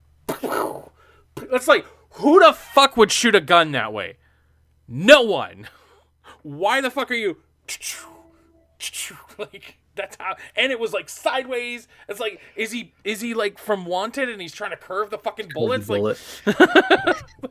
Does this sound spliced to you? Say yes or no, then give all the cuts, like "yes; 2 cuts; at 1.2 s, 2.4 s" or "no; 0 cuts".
no; 0 cuts